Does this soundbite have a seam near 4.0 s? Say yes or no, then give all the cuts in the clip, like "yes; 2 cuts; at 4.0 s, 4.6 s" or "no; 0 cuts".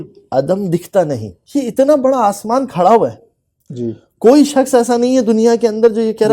no; 1 cut; at 1.3 s